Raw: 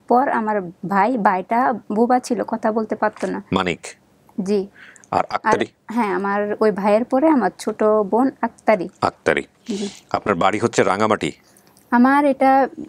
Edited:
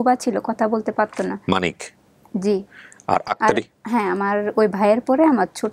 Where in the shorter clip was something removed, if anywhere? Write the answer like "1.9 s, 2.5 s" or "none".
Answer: none

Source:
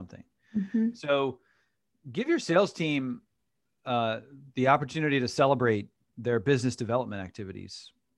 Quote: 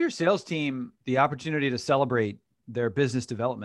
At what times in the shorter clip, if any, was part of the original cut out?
0.9 s

